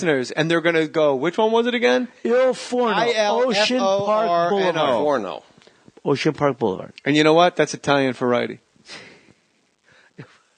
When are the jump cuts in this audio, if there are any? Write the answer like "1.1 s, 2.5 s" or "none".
3.9 s